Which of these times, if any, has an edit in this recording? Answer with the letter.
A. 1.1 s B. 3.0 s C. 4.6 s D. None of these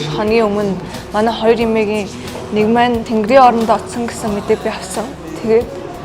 B